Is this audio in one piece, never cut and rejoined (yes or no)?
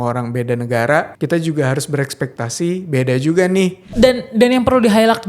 no